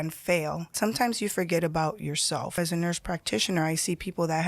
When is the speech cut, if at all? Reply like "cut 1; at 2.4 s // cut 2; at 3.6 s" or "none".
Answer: cut 1; at 0.7 s // cut 2; at 2.6 s